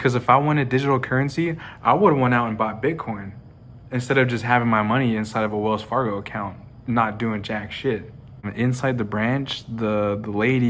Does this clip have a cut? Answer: yes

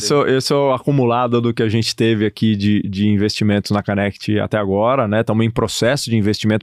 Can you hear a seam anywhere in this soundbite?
no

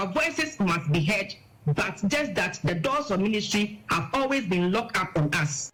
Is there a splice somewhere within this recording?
no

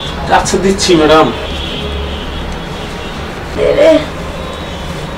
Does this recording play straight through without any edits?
no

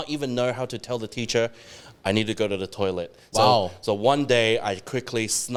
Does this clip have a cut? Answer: no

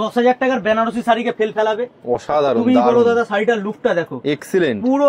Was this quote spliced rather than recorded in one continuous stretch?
no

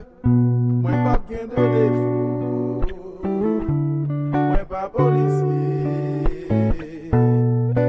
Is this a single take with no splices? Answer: no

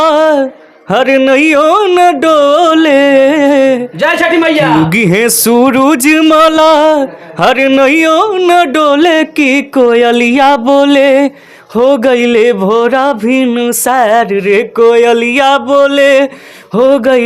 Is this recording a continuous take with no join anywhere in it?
yes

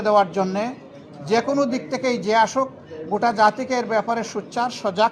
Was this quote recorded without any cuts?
yes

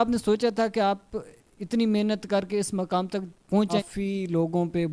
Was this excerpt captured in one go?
no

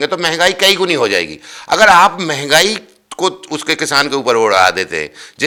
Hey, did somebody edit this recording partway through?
no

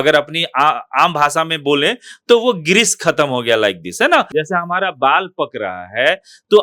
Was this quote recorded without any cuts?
no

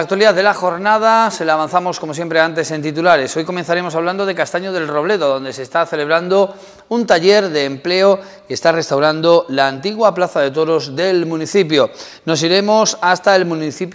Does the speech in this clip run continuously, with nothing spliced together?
no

